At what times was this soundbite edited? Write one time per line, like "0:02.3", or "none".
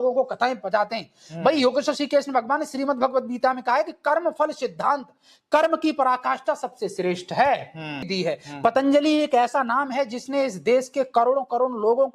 0:08.1